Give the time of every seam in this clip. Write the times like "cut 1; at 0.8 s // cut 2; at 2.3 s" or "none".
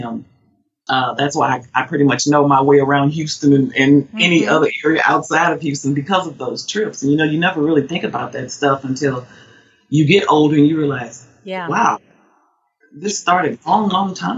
none